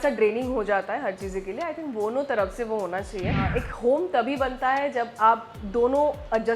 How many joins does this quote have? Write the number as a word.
one